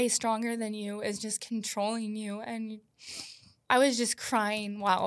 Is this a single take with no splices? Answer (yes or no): no